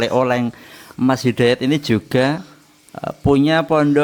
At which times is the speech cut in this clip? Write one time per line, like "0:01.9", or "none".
none